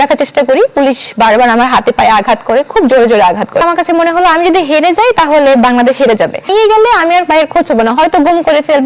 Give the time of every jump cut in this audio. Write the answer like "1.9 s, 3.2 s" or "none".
3.6 s, 6.5 s